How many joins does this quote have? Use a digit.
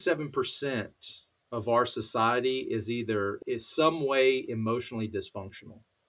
1